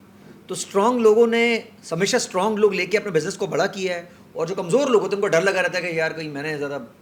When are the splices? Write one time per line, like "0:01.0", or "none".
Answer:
none